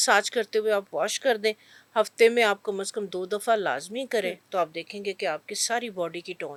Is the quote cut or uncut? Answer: uncut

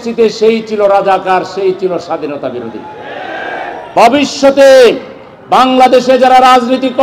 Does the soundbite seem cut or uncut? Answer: cut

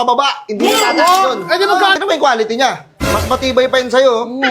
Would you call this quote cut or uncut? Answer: cut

